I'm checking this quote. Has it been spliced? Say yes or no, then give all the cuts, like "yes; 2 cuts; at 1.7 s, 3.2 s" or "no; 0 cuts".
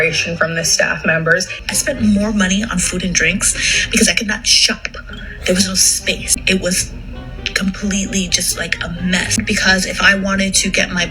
yes; 3 cuts; at 1.6 s, 6.3 s, 9.4 s